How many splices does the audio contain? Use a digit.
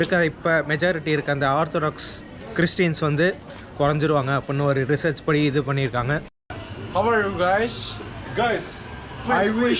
1